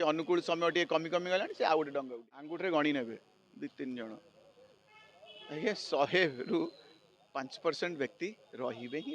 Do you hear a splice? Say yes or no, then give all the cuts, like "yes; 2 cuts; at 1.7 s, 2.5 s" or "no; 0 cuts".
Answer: yes; 1 cut; at 2.5 s